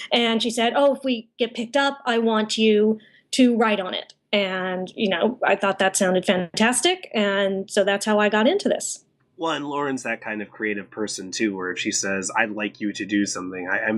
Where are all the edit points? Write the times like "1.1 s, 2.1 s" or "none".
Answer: 7.1 s